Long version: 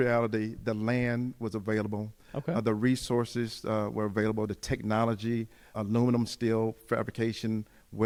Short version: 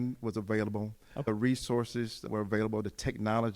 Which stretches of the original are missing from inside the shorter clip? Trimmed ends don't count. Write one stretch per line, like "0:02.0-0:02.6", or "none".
0:02.4-0:02.7
0:03.7-0:03.9